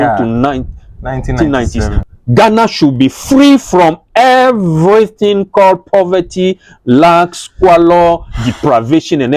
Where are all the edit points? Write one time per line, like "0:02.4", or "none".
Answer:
0:02.0